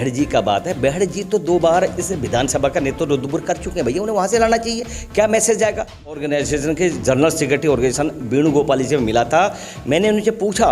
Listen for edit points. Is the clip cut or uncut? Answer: cut